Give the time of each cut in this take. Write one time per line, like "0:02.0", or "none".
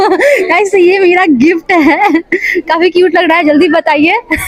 none